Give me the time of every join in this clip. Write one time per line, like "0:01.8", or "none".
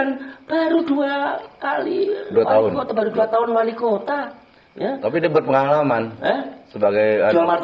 none